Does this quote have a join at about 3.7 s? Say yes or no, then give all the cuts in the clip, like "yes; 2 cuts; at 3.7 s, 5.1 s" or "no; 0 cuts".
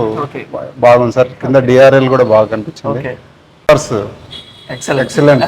yes; 1 cut; at 3.7 s